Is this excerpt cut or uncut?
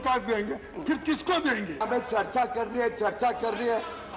cut